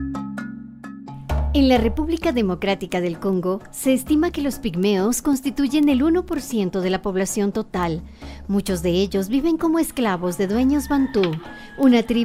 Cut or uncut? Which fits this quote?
uncut